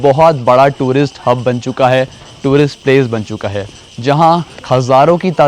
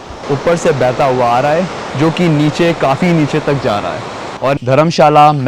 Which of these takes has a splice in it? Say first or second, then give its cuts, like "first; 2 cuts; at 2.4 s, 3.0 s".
second; 1 cut; at 4.6 s